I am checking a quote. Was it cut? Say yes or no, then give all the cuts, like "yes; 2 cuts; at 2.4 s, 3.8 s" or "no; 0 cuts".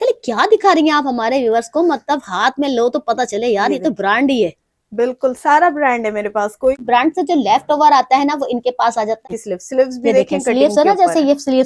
yes; 2 cuts; at 6.8 s, 9.2 s